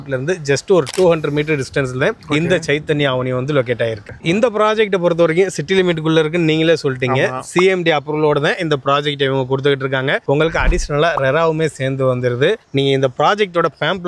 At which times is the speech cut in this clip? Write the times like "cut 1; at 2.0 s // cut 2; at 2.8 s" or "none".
cut 1; at 4.1 s